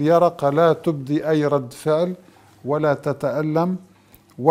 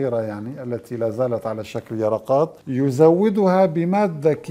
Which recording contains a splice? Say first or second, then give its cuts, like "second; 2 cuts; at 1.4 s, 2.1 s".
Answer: second; 1 cut; at 2.6 s